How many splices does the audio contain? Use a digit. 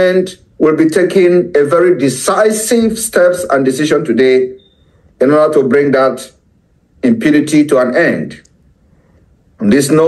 0